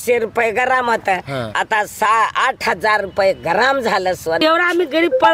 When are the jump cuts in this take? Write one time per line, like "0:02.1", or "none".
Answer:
0:04.4